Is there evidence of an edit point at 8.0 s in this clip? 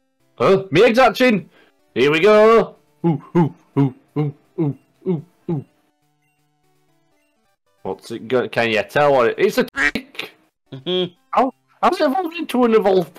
no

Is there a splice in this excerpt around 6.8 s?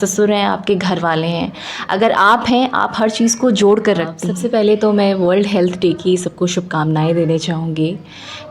no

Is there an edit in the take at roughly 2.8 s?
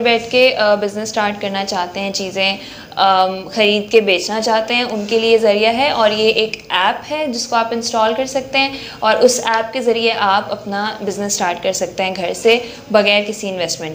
no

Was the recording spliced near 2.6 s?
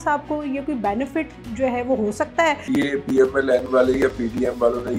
yes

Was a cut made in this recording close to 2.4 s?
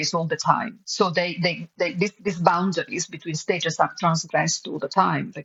no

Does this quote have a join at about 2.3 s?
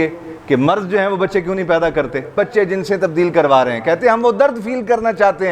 yes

